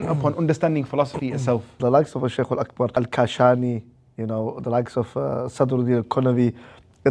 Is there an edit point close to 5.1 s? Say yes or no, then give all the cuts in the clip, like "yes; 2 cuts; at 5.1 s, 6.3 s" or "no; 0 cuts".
no; 2 cuts; at 1.8 s, 2.9 s